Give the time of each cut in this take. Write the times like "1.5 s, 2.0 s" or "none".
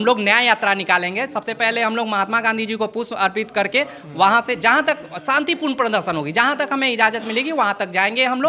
none